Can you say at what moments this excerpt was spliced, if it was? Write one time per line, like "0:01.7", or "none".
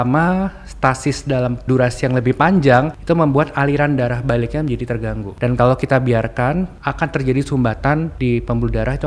0:01.7
0:03.0
0:05.3
0:06.8
0:08.1

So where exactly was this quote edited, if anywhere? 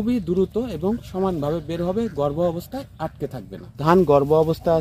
0:03.8

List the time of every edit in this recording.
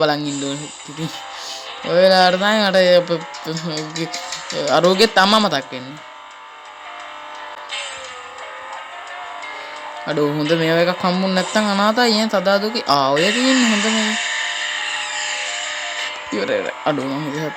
none

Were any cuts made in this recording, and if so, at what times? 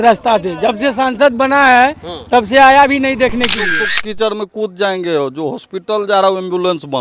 0:03.9

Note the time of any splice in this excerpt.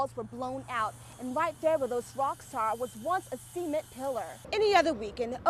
0:04.4

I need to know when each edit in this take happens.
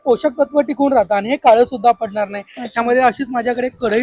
none

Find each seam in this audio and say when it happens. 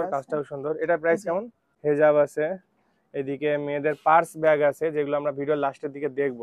0:01.7

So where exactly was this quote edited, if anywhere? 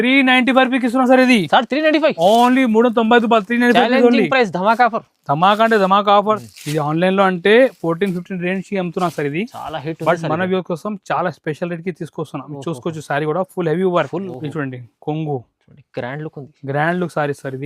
0:06.4
0:14.3

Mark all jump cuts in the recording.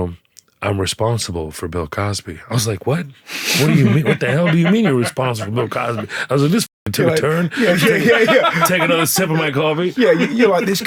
none

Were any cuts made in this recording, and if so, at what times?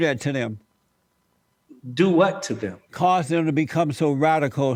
none

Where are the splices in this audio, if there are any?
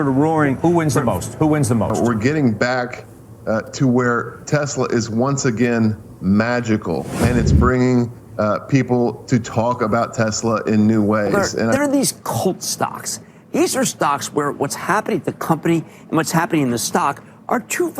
0:01.9
0:11.7

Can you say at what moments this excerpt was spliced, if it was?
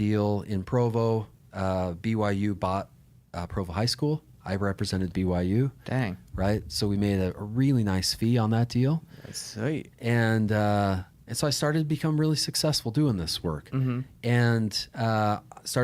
none

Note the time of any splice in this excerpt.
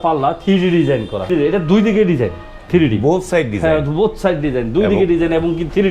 0:01.3

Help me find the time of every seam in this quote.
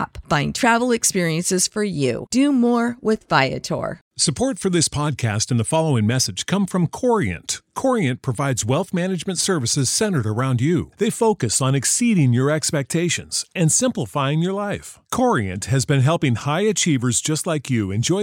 0:04.1

